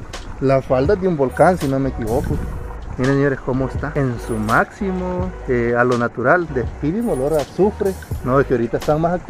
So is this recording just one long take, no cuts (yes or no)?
no